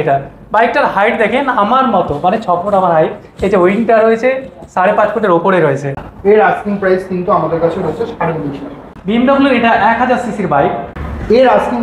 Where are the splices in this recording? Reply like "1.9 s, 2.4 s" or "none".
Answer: 6.0 s, 9.0 s, 10.9 s